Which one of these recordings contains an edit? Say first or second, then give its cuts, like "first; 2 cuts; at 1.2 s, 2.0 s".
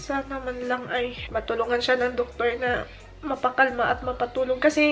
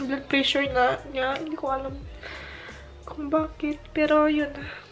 first; 1 cut; at 1.2 s